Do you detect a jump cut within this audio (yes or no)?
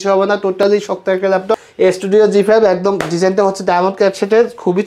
yes